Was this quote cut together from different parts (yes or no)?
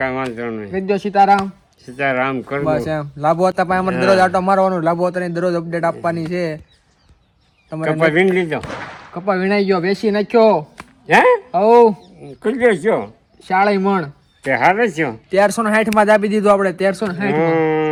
no